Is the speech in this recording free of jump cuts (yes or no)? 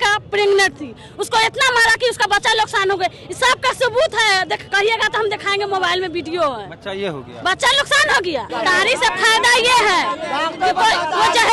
no